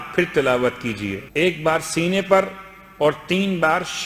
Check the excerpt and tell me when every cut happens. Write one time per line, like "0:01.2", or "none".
0:01.2